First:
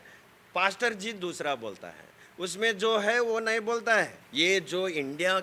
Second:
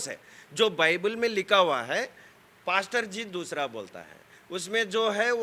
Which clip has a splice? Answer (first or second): first